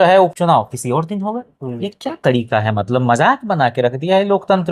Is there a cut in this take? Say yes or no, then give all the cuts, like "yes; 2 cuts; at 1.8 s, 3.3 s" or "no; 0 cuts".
no; 0 cuts